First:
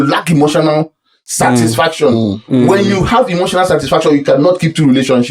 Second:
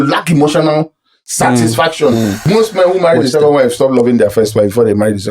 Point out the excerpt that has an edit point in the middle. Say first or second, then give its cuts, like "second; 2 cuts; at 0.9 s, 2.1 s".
second; 1 cut; at 2.4 s